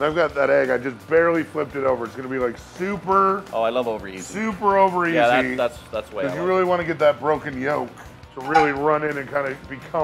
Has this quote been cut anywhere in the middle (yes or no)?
no